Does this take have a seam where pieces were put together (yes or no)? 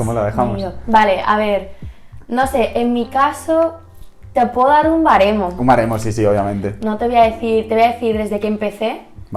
no